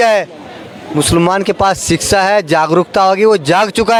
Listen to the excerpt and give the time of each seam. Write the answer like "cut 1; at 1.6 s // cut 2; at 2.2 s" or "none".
none